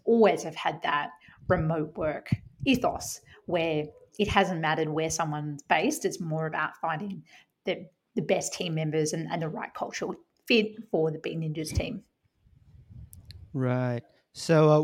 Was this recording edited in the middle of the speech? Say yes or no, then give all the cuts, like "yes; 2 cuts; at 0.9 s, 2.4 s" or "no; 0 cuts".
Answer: no; 0 cuts